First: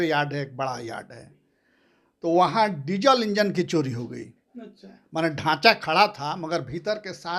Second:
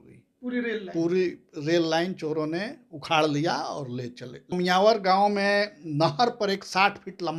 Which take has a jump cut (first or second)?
second